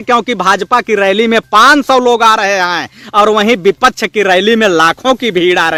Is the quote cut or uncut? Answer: uncut